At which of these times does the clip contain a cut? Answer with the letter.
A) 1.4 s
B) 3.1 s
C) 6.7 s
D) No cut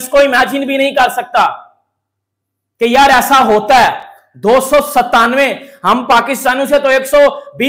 D